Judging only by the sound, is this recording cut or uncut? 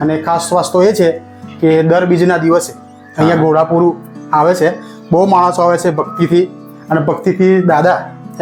uncut